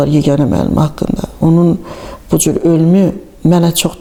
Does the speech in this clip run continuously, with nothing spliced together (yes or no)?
yes